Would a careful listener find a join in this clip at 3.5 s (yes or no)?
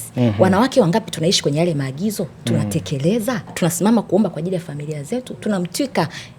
yes